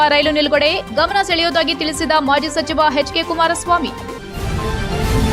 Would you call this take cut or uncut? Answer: cut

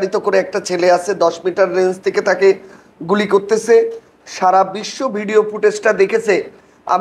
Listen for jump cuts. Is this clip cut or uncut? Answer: uncut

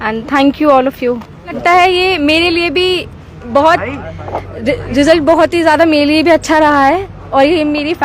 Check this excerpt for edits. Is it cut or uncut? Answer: cut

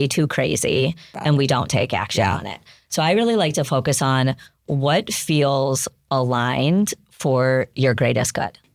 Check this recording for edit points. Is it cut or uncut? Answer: cut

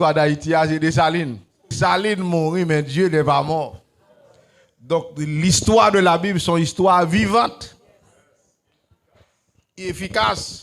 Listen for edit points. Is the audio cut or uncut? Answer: cut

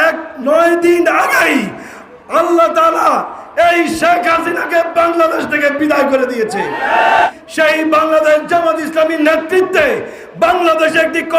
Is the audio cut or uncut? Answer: cut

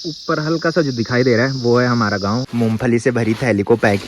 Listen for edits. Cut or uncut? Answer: cut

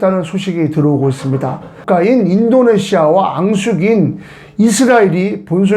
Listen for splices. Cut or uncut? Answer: cut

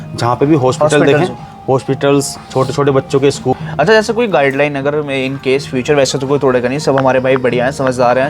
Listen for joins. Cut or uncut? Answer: cut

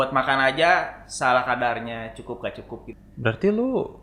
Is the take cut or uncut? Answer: cut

